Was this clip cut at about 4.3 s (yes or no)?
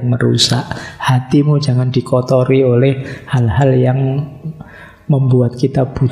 no